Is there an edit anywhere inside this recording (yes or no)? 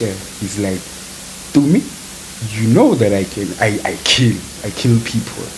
no